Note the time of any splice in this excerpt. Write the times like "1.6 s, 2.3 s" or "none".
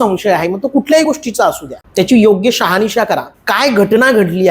1.7 s, 3.3 s